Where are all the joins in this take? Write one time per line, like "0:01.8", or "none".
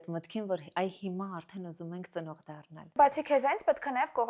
0:03.0